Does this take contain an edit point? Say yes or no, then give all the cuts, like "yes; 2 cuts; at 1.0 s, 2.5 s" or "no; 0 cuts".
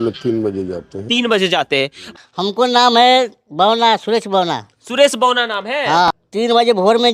yes; 2 cuts; at 2.0 s, 6.2 s